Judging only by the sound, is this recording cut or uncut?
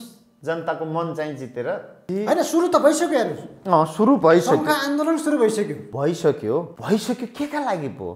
cut